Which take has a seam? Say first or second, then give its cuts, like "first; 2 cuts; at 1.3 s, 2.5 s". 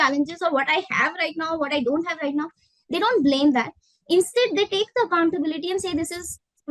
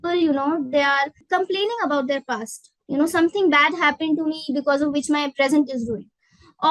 second; 1 cut; at 1.2 s